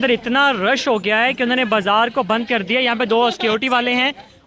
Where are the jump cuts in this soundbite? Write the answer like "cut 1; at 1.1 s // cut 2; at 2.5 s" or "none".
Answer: none